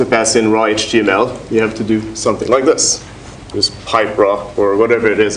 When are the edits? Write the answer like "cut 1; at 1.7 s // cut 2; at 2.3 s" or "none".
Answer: none